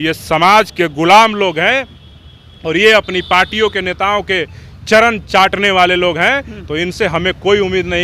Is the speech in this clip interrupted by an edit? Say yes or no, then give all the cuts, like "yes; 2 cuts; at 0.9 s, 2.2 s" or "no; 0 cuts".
no; 0 cuts